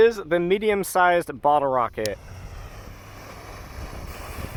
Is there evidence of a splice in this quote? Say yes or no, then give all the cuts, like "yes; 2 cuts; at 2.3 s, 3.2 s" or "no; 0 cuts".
no; 0 cuts